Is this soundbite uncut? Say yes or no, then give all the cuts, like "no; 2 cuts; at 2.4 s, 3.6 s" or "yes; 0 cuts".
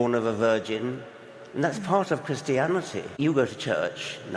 no; 1 cut; at 3.2 s